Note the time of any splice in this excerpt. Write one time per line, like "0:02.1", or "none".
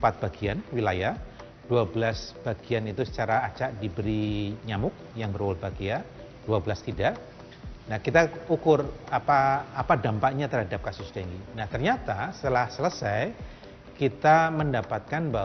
none